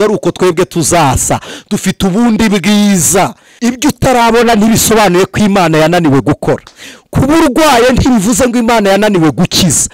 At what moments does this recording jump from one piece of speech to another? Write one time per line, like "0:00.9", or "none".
0:03.4

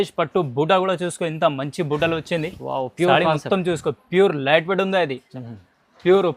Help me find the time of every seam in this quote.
0:05.3

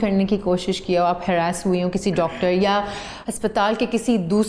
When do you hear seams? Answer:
none

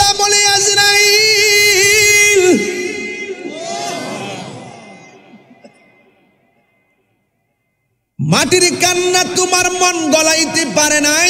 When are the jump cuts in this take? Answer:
none

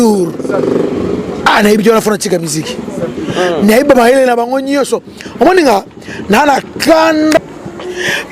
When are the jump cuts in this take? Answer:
0:07.4

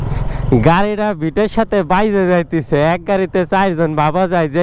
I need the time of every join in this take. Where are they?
none

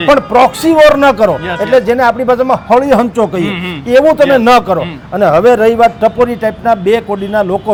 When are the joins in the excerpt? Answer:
none

